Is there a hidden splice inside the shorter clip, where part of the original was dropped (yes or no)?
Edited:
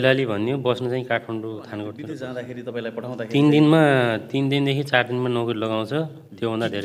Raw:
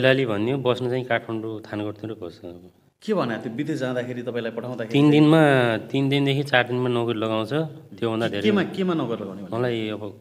yes